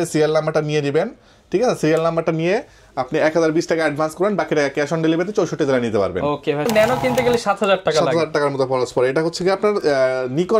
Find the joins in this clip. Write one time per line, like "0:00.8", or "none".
0:06.7